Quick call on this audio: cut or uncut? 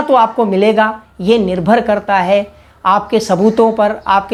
uncut